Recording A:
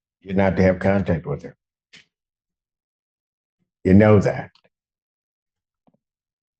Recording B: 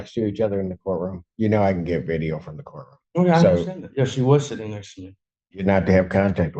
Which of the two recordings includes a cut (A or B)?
A